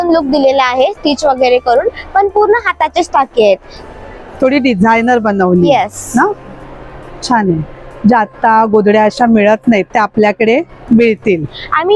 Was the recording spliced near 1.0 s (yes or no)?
no